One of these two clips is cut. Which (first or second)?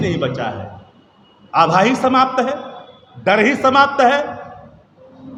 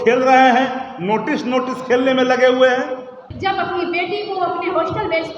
second